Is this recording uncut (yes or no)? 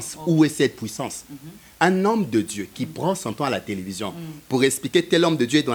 yes